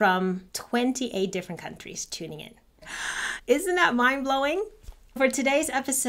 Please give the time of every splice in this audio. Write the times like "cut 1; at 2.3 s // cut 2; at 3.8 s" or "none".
cut 1; at 5.2 s